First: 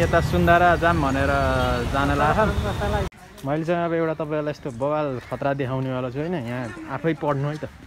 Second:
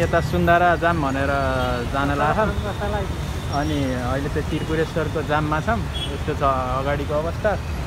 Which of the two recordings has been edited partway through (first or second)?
first